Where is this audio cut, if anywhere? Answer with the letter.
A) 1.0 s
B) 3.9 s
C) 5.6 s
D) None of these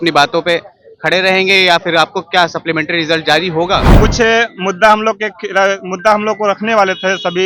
B